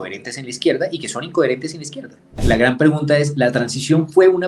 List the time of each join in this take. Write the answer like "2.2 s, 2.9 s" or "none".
2.4 s

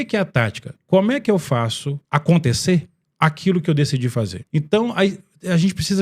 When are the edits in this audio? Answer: 1.9 s, 4.4 s

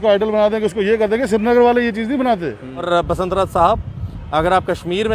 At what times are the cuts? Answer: 2.9 s

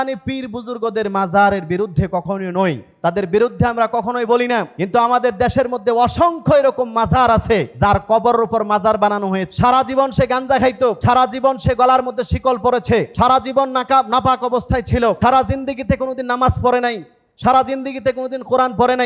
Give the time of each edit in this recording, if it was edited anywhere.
2.9 s, 4.8 s, 7.7 s, 9.5 s, 11.0 s, 13.1 s, 15.2 s

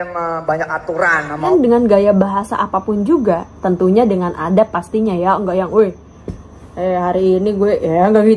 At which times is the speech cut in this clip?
1.5 s

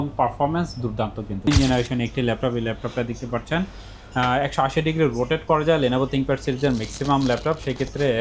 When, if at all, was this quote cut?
1.5 s

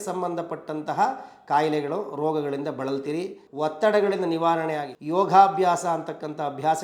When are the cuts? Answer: 3.4 s, 4.9 s

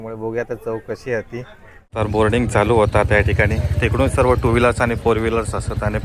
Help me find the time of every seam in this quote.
2.0 s

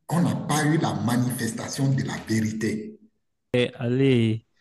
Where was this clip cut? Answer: 3.5 s

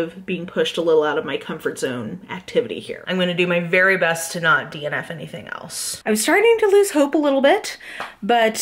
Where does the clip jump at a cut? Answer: 3.1 s, 5.9 s

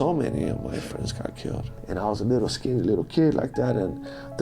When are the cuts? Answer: 1.7 s

